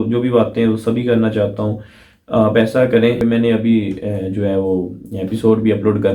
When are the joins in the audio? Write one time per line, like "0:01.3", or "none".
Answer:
0:03.2